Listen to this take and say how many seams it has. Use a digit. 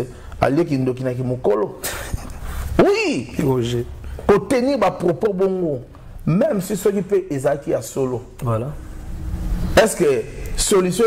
0